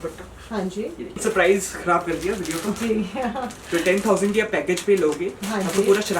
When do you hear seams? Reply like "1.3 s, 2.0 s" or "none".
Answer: 1.2 s